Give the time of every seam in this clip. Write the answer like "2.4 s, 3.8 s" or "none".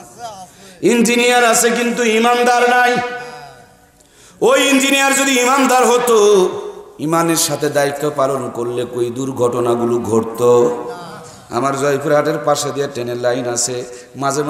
none